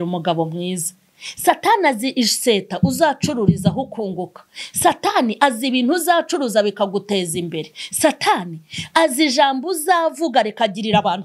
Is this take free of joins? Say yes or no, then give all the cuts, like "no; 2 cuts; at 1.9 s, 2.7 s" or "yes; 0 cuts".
yes; 0 cuts